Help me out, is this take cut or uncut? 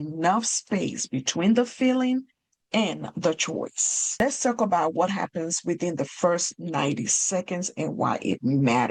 uncut